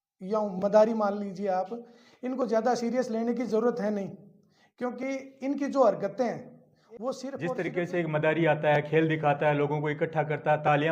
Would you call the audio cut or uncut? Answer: cut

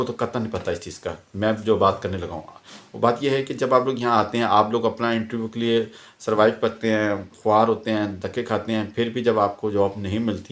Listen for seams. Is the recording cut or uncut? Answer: uncut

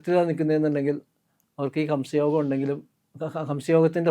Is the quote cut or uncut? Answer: uncut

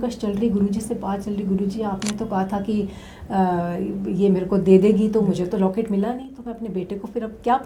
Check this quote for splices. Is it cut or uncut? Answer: uncut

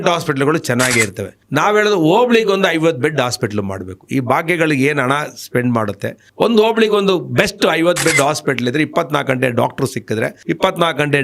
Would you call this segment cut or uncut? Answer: uncut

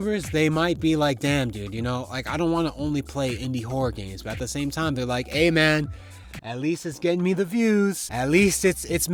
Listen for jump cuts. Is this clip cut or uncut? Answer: uncut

